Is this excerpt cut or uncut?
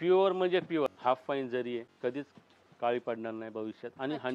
cut